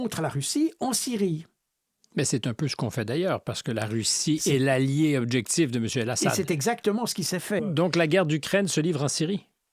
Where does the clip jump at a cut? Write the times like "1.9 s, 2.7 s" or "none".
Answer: 7.7 s